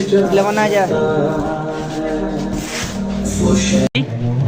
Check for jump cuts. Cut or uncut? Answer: uncut